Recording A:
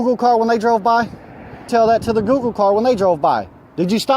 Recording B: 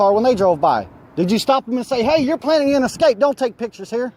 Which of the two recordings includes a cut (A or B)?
A